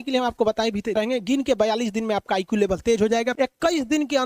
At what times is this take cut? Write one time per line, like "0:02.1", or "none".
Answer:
0:01.0
0:03.3